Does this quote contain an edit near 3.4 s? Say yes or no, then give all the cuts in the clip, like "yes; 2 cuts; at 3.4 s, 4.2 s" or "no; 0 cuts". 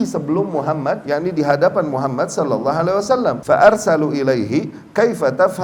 yes; 2 cuts; at 1.0 s, 3.4 s